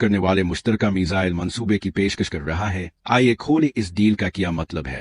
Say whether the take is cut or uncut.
uncut